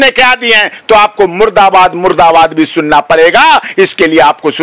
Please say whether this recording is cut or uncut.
uncut